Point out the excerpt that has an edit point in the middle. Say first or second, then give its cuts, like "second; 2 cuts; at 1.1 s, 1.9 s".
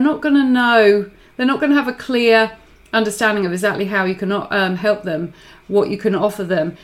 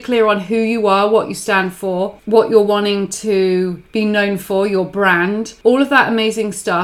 second; 3 cuts; at 2.2 s, 3.8 s, 5.5 s